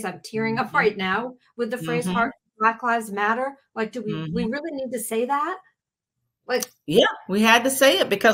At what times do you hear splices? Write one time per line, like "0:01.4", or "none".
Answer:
none